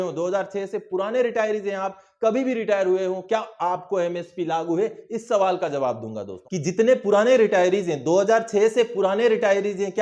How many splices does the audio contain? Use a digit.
1